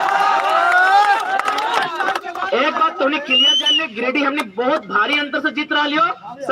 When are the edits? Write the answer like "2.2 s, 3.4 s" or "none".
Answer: none